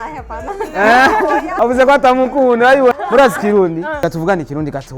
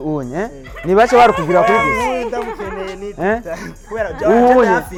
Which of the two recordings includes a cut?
first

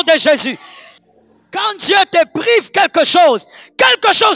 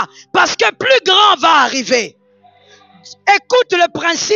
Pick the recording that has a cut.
first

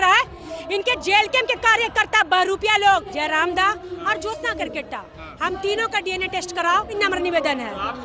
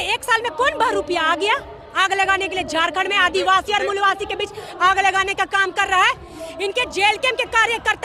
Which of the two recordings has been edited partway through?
first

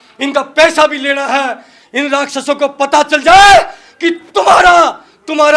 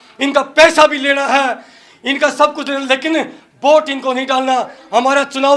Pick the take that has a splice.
first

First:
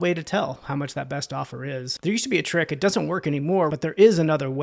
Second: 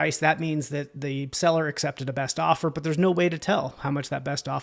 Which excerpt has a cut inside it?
first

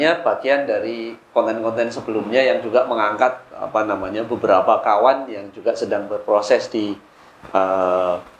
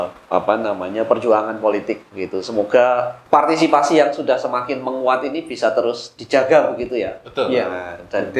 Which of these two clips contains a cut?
second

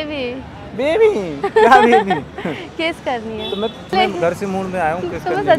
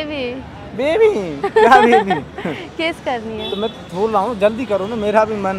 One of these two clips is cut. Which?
first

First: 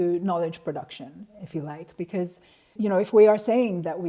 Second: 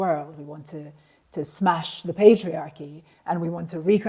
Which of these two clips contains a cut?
first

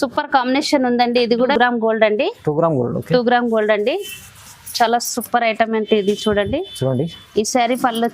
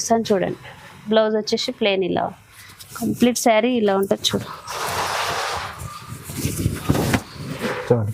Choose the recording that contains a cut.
first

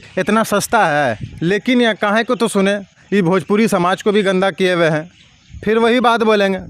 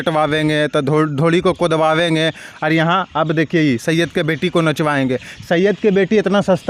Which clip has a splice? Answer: first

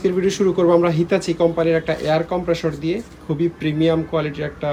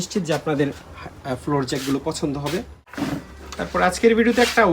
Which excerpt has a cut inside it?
second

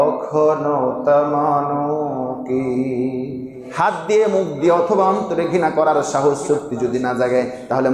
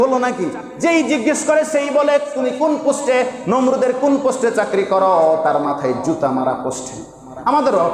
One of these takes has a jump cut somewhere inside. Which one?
first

